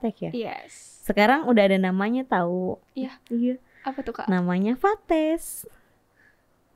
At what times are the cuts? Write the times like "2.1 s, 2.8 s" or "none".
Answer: none

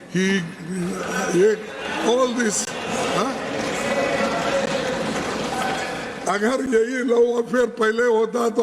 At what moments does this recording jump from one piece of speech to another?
none

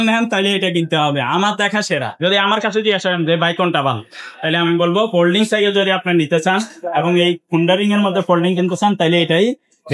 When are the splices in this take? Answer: none

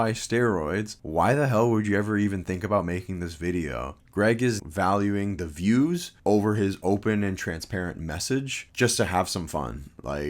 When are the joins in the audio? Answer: 1.0 s, 4.6 s

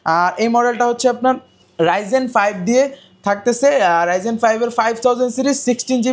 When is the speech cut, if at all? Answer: none

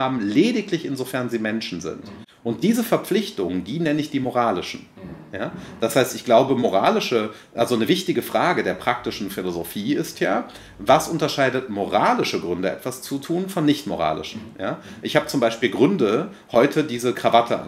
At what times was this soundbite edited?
none

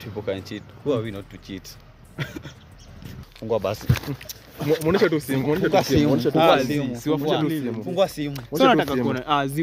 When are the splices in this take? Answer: 3.3 s

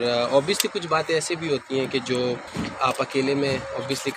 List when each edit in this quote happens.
2.5 s

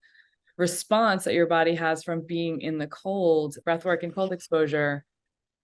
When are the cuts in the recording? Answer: 3.6 s

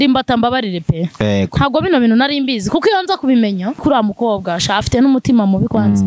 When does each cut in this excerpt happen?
3.8 s

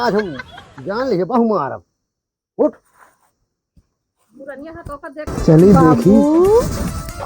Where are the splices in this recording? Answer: 5.3 s

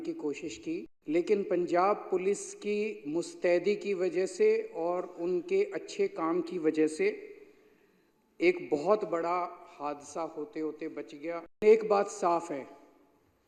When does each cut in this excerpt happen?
0.9 s, 11.6 s

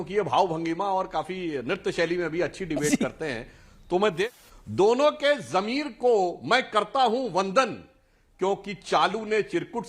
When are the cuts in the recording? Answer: 4.3 s

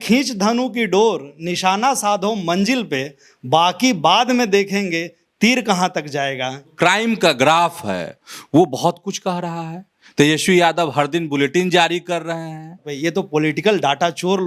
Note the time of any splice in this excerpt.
6.7 s, 12.9 s

